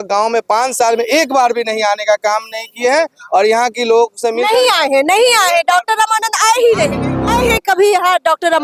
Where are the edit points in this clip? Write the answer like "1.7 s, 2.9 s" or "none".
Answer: 7.3 s